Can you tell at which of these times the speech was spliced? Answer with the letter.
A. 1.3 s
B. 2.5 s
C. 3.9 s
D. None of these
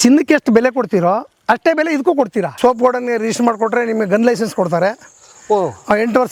B